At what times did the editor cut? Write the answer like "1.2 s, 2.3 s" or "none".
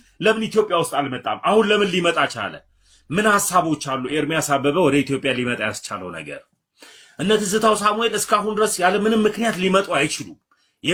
none